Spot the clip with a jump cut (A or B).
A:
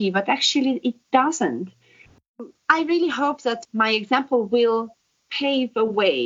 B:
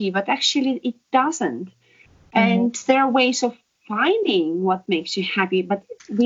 A